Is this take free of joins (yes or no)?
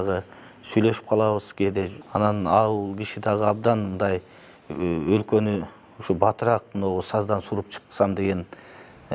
no